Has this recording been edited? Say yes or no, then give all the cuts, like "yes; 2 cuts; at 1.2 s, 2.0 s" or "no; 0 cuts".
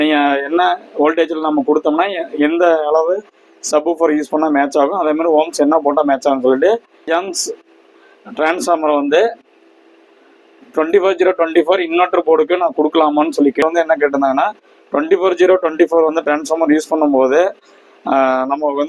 yes; 2 cuts; at 7.0 s, 13.6 s